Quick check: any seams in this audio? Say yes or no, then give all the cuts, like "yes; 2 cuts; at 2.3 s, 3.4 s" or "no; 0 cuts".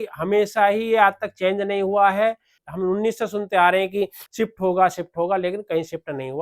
yes; 2 cuts; at 2.5 s, 4.2 s